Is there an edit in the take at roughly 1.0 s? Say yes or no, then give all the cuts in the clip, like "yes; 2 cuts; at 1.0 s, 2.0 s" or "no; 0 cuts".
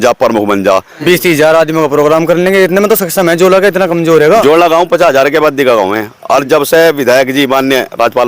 yes; 2 cuts; at 1.0 s, 4.4 s